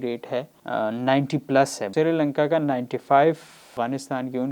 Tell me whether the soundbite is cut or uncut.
cut